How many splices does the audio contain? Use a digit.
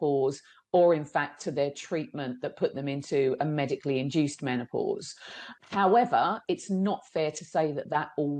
1